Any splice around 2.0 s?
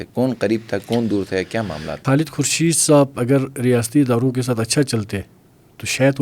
yes; 1 cut; at 2.0 s

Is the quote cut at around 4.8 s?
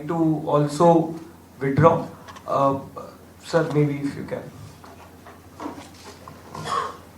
no; 0 cuts

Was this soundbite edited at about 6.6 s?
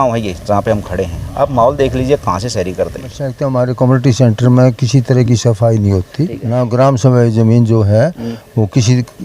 yes; 2 cuts; at 3.5 s, 6.6 s

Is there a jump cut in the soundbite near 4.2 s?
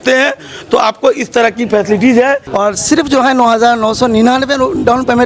no; 1 cut; at 2.5 s

